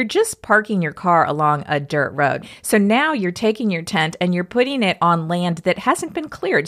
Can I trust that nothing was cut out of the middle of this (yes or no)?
no